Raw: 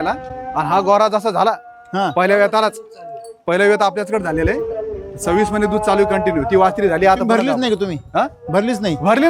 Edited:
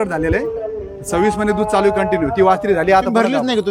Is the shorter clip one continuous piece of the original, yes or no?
yes